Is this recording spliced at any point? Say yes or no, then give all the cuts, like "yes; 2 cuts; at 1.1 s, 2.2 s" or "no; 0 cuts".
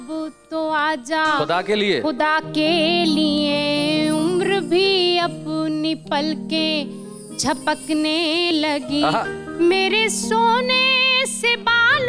no; 0 cuts